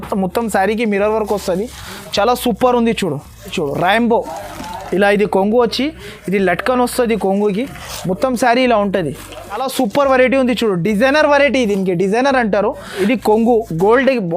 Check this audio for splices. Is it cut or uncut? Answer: cut